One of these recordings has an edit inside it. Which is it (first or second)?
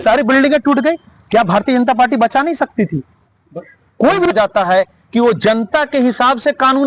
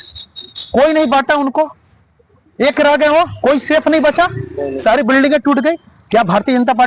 first